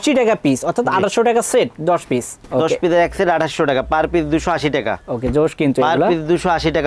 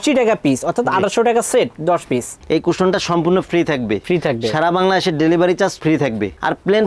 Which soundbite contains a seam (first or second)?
second